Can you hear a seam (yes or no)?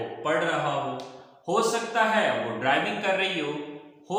no